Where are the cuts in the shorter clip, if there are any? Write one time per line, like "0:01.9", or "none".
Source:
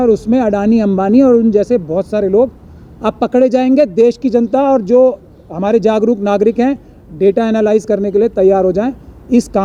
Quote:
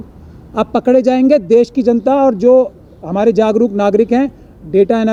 none